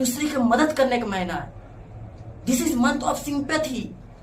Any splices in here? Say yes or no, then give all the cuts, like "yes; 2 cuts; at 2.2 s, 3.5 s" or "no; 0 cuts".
no; 0 cuts